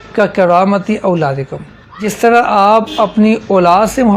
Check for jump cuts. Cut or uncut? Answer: cut